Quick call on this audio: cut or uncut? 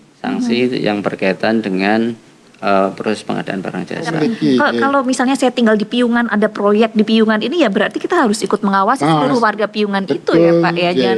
cut